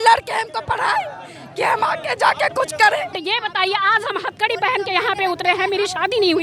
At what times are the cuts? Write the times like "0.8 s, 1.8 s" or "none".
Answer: 3.2 s